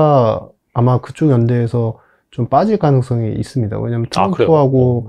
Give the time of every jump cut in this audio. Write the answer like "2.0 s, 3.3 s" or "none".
none